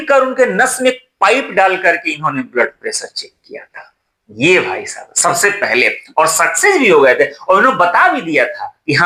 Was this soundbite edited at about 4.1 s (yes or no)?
no